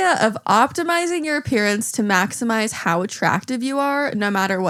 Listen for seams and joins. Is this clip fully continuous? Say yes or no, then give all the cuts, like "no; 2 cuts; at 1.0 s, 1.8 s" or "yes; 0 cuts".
yes; 0 cuts